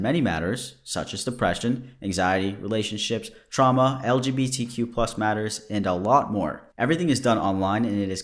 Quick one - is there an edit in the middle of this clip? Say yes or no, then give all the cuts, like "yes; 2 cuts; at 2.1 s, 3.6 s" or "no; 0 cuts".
no; 0 cuts